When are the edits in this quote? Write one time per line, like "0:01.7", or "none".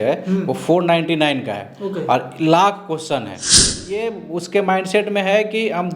0:03.6